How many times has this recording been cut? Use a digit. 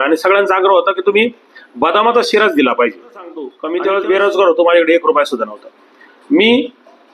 1